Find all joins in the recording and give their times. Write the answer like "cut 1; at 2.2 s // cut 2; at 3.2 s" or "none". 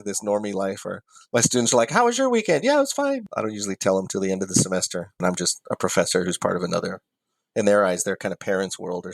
cut 1; at 3.3 s // cut 2; at 5.2 s